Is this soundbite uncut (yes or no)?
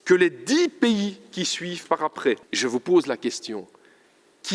no